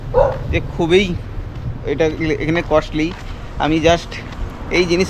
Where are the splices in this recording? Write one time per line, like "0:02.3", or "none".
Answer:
none